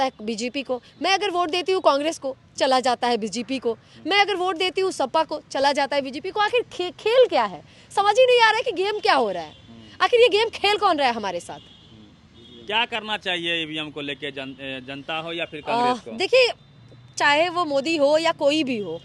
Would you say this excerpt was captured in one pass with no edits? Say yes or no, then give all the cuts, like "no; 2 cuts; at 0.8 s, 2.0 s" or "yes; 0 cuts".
yes; 0 cuts